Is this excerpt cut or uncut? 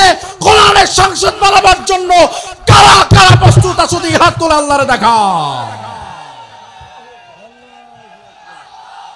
uncut